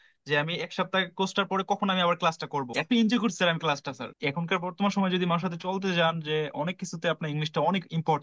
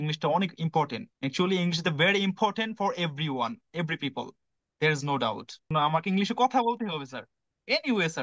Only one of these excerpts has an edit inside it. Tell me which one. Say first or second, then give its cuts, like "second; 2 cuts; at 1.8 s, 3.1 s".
first; 2 cuts; at 2.7 s, 4.0 s